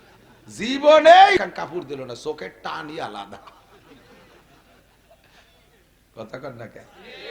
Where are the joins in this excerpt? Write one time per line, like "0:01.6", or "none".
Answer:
0:01.4